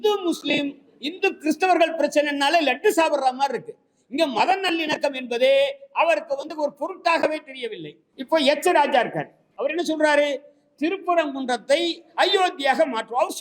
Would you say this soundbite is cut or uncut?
cut